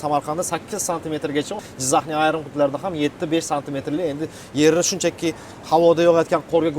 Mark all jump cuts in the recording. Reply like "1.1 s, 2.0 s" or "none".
1.6 s